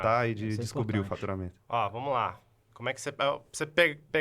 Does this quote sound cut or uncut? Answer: uncut